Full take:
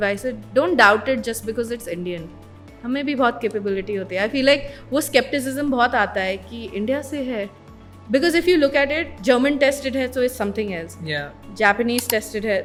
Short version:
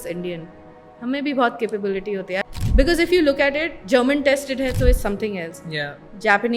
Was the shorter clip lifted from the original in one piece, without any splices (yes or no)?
no